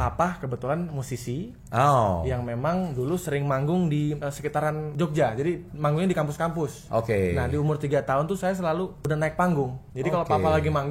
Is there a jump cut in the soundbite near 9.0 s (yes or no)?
yes